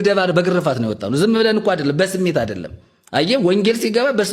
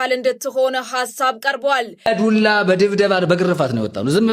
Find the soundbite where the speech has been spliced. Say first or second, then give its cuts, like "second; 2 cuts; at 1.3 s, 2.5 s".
second; 1 cut; at 1.9 s